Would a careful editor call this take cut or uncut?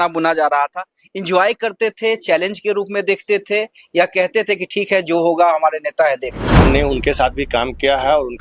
cut